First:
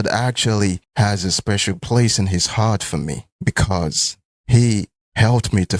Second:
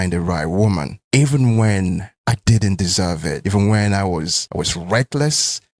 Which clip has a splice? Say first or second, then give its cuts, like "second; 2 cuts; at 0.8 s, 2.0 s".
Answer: second; 4 cuts; at 0.9 s, 2.1 s, 3.4 s, 4.4 s